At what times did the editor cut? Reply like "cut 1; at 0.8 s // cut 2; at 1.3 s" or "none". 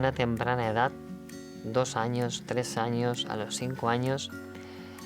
none